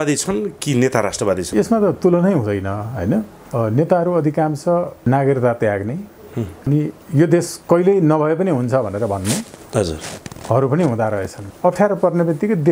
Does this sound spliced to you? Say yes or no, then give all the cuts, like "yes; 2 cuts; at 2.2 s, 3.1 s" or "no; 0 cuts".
yes; 4 cuts; at 1.5 s, 3.4 s, 5.0 s, 11.3 s